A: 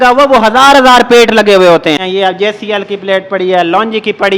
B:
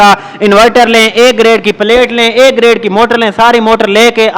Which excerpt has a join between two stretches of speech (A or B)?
A